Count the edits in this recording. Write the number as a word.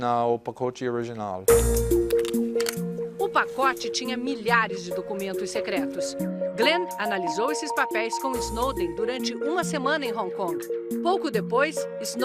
one